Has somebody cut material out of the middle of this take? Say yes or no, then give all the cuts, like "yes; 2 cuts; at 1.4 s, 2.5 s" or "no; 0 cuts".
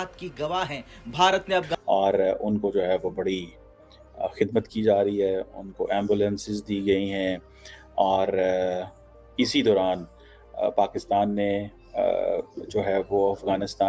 yes; 1 cut; at 1.7 s